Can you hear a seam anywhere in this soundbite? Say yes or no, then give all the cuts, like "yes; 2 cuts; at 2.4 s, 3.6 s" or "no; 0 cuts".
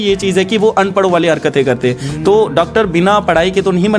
no; 0 cuts